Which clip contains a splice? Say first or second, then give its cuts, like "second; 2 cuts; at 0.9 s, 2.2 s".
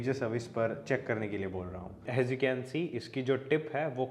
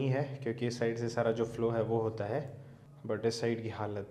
first; 1 cut; at 2.0 s